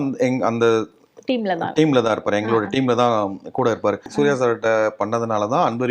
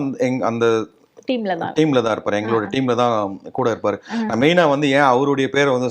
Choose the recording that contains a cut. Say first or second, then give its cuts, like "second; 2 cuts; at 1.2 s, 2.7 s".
first; 1 cut; at 4.1 s